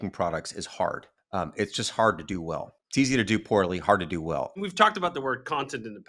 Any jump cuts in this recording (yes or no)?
yes